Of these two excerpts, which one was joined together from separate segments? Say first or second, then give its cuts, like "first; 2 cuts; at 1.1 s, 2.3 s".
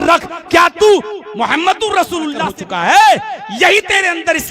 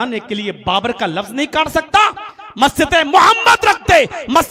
first; 1 cut; at 2.5 s